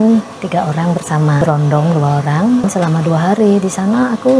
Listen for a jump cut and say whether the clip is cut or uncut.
cut